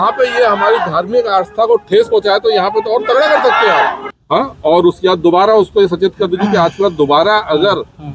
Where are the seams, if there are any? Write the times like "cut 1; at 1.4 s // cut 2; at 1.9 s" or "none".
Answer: cut 1; at 4.1 s